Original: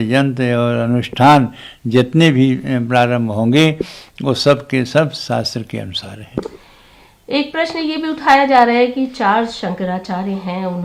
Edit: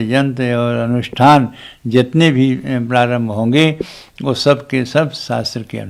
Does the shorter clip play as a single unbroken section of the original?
yes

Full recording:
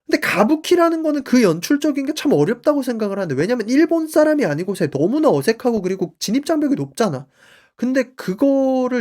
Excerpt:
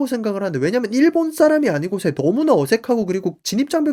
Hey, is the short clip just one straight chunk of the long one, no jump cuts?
yes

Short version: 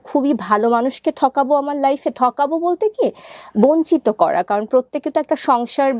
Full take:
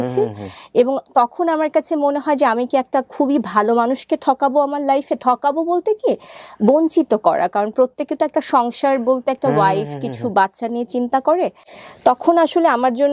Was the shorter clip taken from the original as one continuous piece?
yes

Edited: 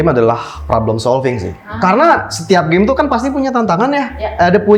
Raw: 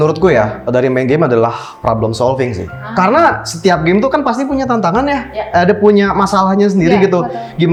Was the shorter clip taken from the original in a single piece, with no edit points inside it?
yes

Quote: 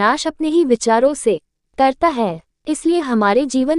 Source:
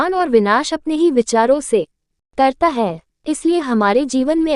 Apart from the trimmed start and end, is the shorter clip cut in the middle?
yes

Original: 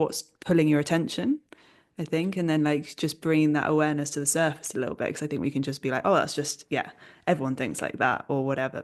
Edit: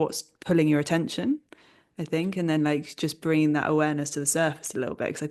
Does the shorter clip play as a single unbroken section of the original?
yes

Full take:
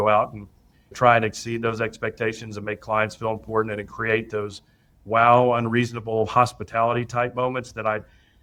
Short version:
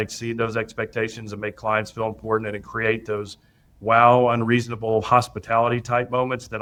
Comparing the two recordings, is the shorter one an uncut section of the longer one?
yes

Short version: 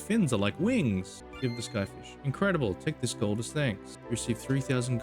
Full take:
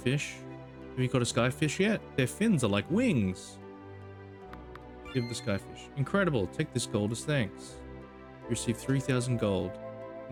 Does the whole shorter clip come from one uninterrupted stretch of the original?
no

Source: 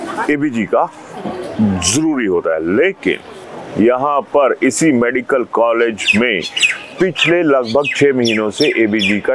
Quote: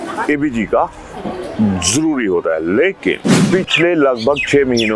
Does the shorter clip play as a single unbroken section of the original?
no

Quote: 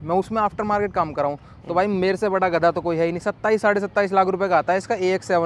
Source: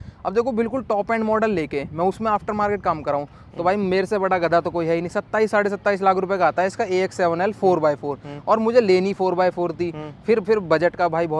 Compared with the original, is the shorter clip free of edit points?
yes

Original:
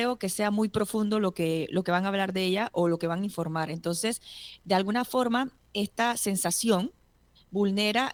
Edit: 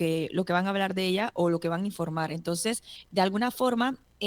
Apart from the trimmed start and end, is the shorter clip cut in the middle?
yes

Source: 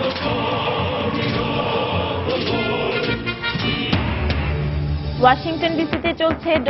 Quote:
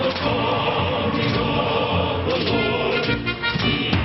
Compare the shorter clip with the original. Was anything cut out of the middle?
no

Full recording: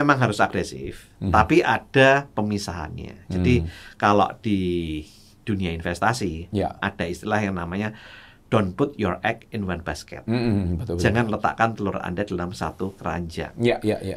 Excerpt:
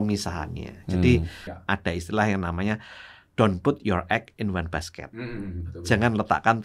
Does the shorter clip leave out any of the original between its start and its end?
yes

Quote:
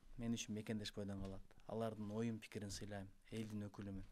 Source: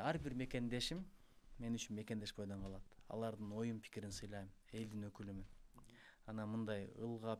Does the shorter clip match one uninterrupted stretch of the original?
yes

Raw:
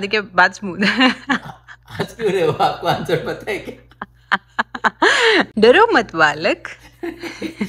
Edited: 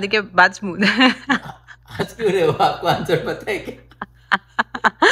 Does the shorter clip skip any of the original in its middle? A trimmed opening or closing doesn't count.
no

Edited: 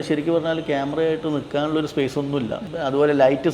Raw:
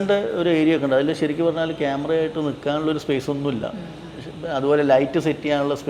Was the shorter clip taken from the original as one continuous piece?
no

